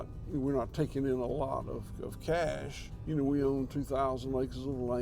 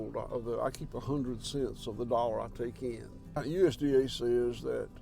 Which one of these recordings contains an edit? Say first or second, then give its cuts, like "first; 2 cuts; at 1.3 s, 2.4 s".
second; 1 cut; at 3.4 s